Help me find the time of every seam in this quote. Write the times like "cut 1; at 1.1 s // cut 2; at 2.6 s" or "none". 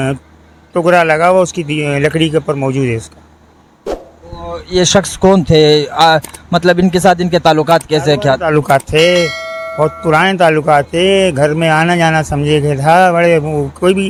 none